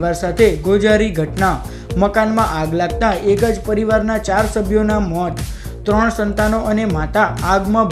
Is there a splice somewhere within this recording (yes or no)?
no